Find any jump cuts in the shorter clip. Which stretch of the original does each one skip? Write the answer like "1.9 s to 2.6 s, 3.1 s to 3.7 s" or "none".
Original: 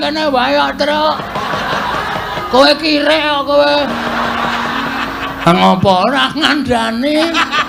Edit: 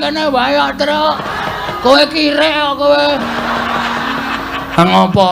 1.3 s to 2.0 s